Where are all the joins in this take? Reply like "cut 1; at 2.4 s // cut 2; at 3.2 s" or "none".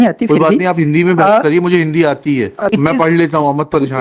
cut 1; at 2.7 s